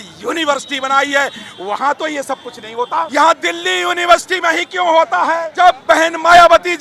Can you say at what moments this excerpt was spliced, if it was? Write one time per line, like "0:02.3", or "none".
0:03.1
0:05.5